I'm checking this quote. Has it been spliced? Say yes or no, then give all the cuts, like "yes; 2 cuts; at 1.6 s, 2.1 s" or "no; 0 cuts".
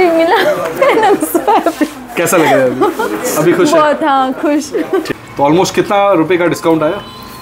yes; 1 cut; at 5.1 s